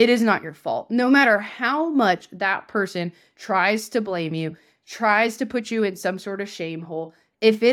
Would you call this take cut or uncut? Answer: uncut